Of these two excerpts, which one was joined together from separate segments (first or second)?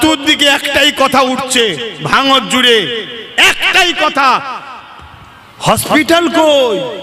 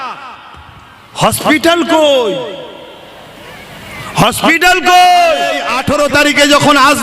second